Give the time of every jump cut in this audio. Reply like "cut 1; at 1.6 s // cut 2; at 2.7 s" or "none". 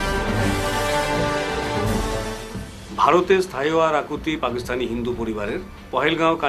none